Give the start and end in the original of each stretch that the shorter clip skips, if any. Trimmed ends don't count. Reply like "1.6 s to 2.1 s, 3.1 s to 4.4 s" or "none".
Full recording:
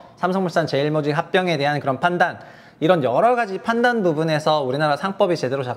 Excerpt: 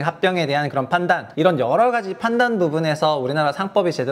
2.4 s to 2.7 s